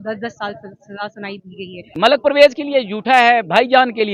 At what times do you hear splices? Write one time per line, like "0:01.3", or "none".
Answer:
0:01.9

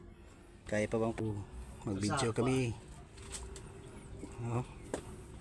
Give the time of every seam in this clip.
0:01.2

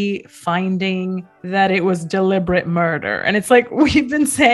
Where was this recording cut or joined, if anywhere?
none

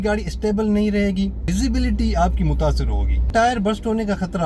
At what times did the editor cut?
0:01.5
0:03.3

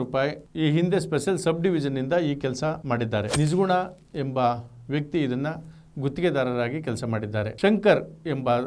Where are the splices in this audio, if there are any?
0:07.5

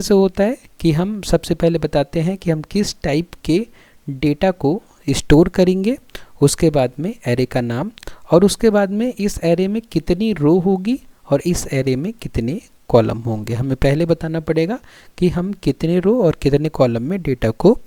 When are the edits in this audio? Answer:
none

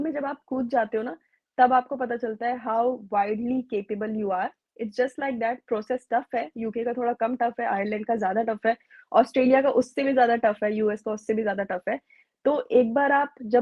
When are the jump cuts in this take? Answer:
none

